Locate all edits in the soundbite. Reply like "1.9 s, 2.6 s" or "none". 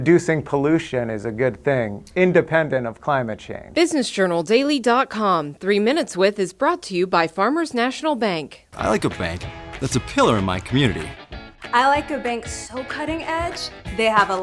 3.7 s